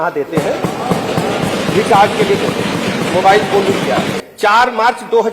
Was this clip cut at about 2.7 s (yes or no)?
no